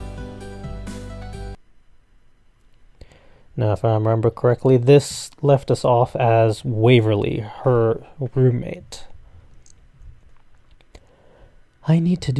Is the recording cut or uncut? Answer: uncut